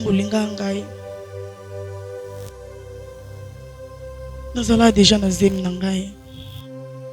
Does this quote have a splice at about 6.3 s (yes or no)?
yes